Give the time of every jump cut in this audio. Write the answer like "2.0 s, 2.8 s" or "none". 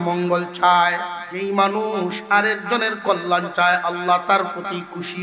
1.2 s